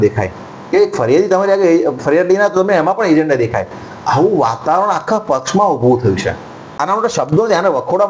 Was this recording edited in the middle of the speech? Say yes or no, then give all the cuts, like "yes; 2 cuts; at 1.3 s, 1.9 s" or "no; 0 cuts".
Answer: yes; 1 cut; at 6.8 s